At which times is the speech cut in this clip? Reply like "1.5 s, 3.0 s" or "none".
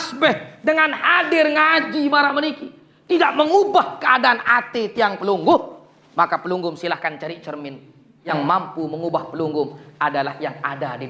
8.2 s